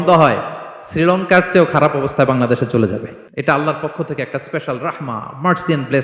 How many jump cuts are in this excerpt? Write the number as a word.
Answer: one